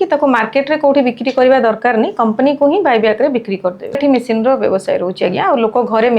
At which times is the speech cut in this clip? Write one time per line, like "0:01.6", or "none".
0:04.0